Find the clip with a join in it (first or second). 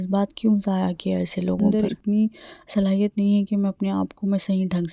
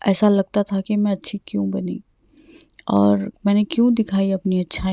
first